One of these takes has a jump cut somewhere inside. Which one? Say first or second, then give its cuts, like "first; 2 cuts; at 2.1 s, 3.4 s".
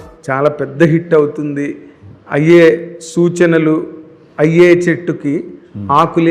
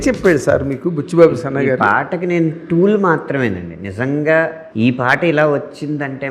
second; 1 cut; at 4.6 s